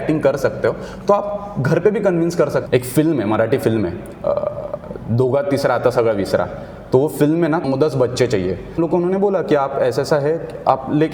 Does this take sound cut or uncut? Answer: cut